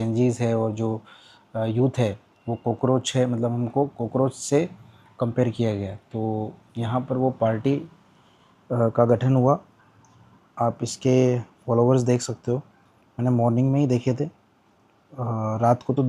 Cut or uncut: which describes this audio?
cut